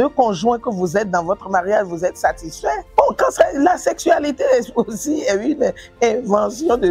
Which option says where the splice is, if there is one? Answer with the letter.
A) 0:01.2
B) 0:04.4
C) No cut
C